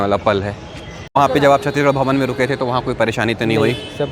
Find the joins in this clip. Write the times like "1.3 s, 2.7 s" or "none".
1.2 s